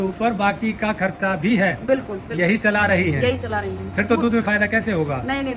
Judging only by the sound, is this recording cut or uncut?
uncut